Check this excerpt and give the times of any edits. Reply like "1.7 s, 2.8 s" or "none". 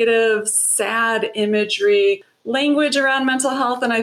2.3 s